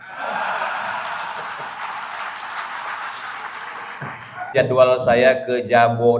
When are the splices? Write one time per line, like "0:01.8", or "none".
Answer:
0:04.5

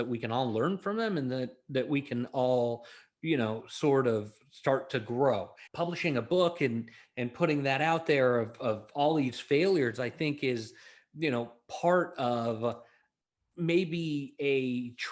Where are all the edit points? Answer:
none

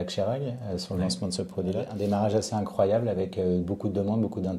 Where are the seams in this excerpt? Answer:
0:01.9

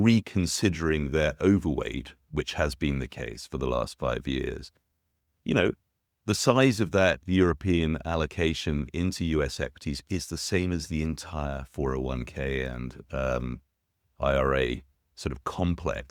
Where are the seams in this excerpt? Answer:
none

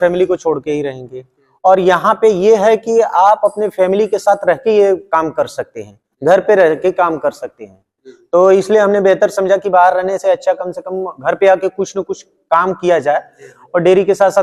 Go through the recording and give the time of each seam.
none

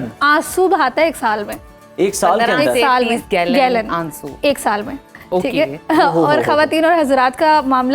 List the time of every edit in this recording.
none

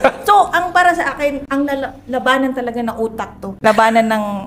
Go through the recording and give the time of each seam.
0:03.4

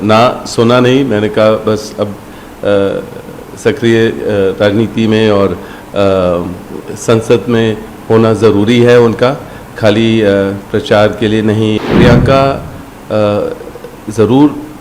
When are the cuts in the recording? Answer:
0:11.8

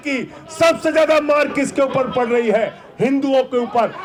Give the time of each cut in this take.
none

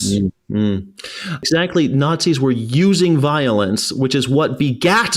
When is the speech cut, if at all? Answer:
0:01.4

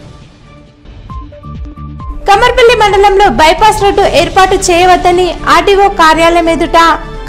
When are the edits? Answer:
0:01.5

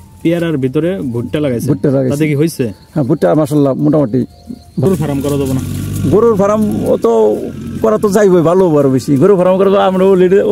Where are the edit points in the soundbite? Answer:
0:04.9

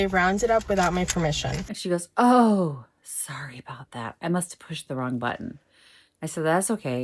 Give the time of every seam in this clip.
0:01.7

